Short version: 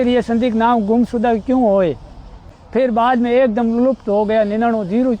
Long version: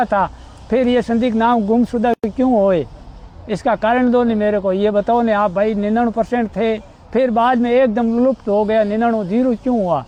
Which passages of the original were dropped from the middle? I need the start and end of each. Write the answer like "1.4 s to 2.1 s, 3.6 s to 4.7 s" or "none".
2.2 s to 2.3 s, 3.4 s to 6.9 s